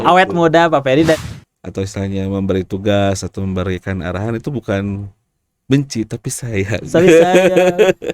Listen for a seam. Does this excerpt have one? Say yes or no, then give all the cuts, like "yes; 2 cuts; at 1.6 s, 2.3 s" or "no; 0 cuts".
yes; 1 cut; at 1.2 s